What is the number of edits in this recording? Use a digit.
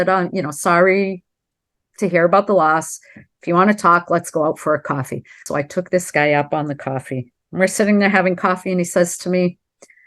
1